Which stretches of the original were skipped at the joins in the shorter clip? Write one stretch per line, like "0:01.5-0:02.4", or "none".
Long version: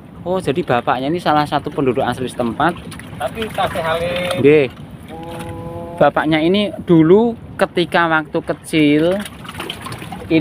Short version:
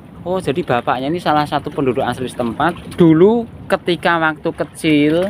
0:02.9-0:06.8